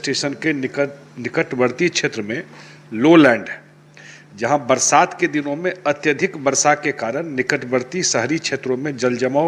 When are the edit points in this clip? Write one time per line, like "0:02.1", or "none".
none